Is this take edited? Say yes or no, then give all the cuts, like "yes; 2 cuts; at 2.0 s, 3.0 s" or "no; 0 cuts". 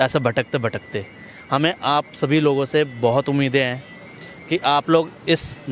no; 0 cuts